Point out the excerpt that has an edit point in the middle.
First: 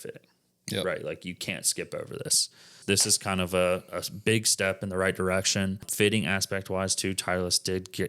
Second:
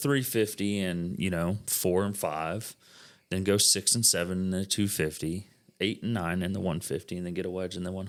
first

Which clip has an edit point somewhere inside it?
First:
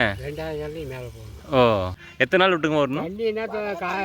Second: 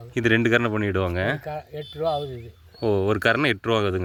first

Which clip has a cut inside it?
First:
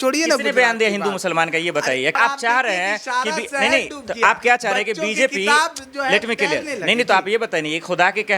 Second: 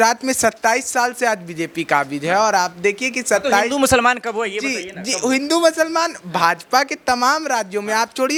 first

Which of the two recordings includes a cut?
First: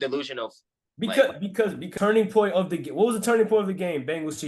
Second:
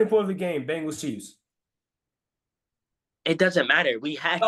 first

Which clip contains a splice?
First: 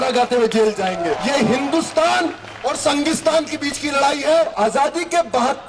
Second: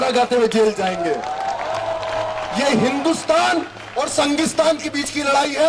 first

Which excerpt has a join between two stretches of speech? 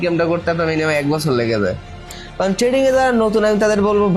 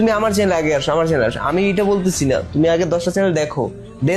first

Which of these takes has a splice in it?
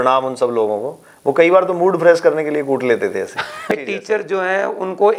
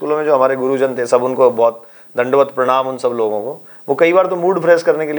first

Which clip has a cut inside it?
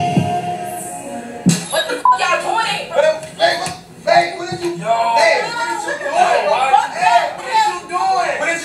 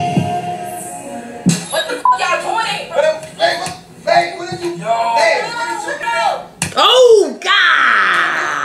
second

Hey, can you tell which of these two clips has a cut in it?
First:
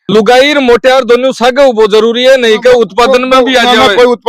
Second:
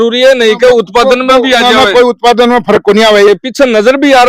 second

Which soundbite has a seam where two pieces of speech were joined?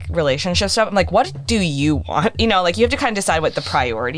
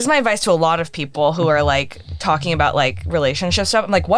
first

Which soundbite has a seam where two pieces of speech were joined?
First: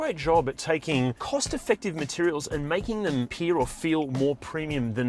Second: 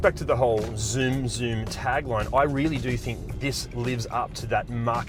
first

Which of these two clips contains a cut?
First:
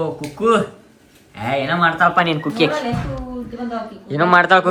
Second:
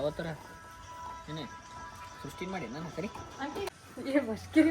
second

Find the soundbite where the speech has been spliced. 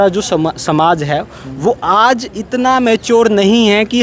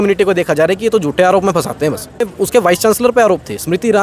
second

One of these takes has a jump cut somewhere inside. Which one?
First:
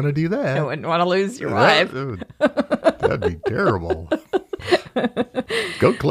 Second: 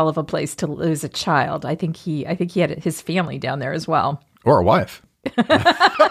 first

